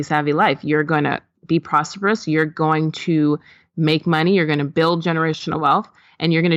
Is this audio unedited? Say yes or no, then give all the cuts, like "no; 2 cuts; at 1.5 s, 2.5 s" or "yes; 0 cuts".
yes; 0 cuts